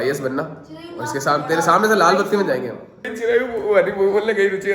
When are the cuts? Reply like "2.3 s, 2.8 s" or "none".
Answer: 3.1 s